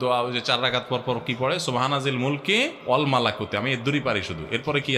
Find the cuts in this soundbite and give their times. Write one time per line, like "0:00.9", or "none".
0:02.8